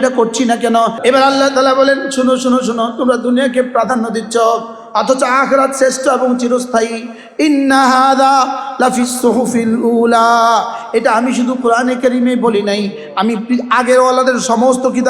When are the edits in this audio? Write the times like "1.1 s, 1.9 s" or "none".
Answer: 1.0 s